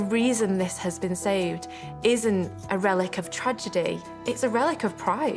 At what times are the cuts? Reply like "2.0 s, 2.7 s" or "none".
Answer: 2.6 s, 4.1 s